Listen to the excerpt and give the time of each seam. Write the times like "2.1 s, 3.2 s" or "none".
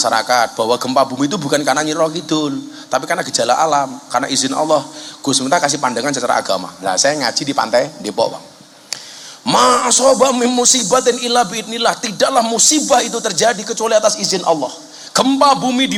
none